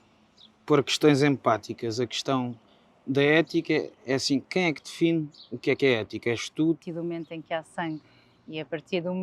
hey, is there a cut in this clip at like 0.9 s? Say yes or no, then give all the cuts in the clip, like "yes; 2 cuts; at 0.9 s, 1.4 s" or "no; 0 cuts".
no; 1 cut; at 6.8 s